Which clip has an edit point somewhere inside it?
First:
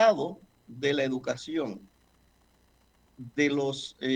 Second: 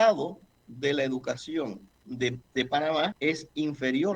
second; 2 cuts; at 2.0 s, 3.2 s

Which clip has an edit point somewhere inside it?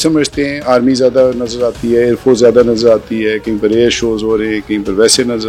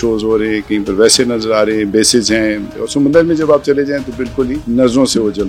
second; 2 cuts; at 2.7 s, 4.6 s

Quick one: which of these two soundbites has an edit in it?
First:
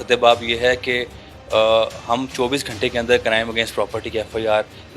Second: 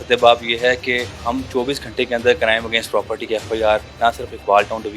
second; 2 cuts; at 1.2 s, 3.9 s

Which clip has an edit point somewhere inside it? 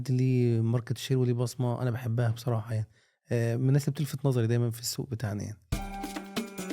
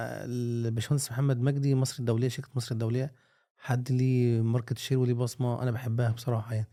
first; 1 cut; at 5.8 s

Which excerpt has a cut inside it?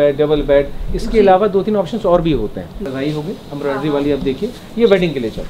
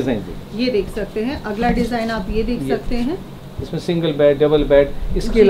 first; 1 cut; at 2.8 s

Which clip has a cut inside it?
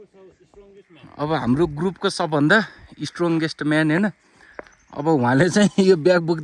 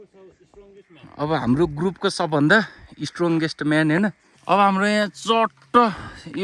second; 1 cut; at 4.3 s

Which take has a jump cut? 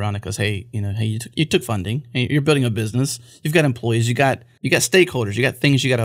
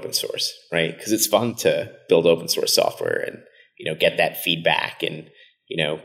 first; 1 cut; at 4.5 s

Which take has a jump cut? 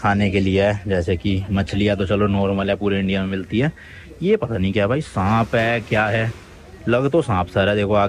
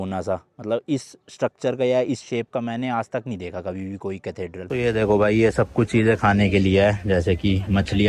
second; 1 cut; at 4.7 s

